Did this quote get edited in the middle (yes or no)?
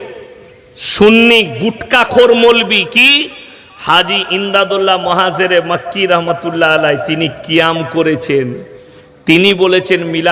no